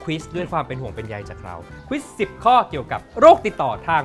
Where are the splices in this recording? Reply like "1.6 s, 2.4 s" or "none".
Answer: 1.7 s